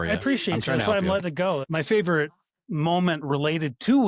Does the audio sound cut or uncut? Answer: cut